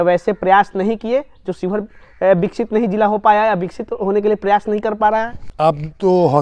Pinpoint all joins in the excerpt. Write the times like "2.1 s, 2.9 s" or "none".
5.4 s

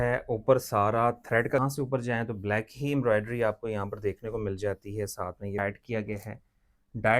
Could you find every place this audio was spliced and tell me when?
1.6 s, 5.6 s

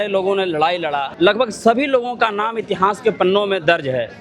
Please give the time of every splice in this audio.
1.1 s

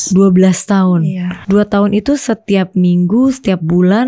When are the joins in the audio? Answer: 1.3 s

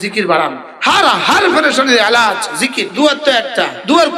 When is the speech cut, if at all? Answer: 2.8 s

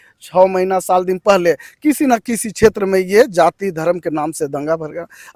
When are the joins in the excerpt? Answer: none

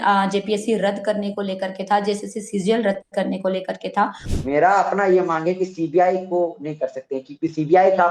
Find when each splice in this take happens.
4.2 s

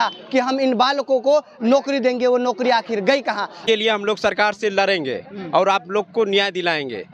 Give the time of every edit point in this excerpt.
3.6 s

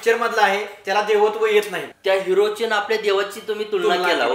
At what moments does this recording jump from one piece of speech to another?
1.8 s

